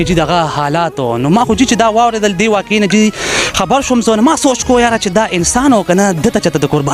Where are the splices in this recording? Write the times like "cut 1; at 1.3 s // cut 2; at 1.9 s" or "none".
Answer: none